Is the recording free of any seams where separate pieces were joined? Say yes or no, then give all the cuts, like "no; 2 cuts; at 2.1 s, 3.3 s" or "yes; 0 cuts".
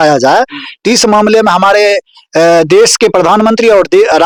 yes; 0 cuts